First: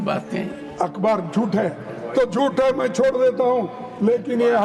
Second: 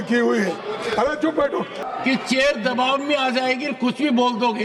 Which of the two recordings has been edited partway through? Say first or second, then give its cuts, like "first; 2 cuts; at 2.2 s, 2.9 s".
second; 1 cut; at 1.8 s